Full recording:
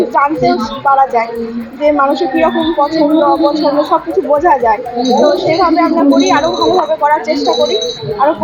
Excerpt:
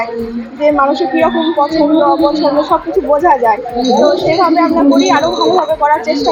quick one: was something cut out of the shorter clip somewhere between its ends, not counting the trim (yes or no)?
no